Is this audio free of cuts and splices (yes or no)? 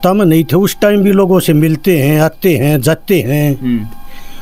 yes